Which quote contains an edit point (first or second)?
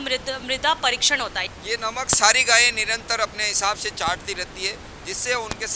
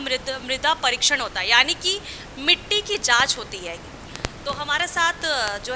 first